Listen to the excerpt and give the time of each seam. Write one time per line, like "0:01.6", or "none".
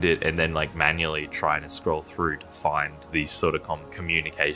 none